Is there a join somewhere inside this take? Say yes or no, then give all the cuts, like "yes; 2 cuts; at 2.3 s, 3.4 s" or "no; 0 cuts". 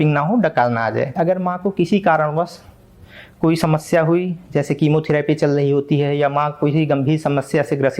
yes; 1 cut; at 1.1 s